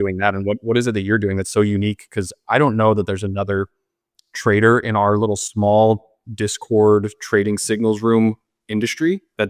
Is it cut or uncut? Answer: uncut